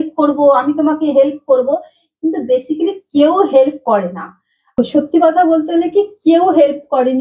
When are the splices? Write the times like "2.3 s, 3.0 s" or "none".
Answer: 4.5 s